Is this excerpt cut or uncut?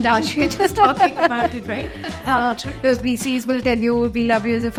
uncut